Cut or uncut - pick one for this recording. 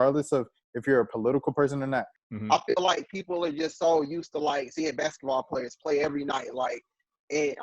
cut